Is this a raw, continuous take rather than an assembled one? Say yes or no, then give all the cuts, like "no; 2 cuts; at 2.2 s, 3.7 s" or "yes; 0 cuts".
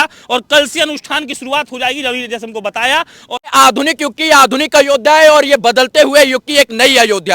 no; 1 cut; at 3.5 s